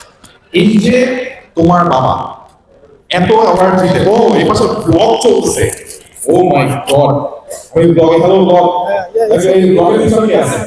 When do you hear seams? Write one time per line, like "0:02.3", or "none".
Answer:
none

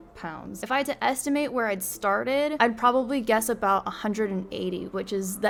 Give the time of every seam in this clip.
none

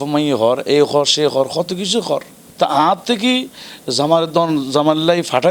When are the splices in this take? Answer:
0:02.4

